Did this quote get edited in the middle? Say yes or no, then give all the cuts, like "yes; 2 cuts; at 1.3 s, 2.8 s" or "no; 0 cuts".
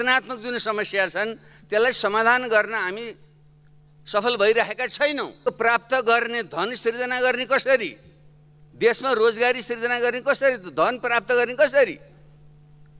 yes; 1 cut; at 5.4 s